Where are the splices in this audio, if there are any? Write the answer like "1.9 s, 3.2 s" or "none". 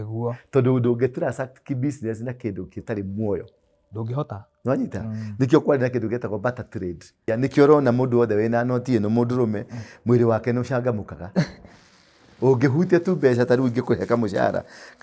7.2 s